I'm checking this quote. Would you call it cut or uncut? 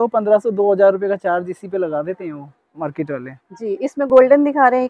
uncut